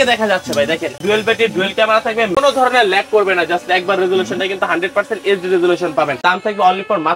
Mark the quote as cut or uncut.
cut